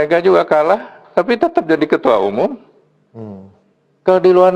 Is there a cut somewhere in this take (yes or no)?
no